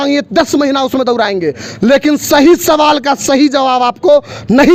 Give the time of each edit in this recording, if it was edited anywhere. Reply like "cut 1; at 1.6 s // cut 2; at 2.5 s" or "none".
none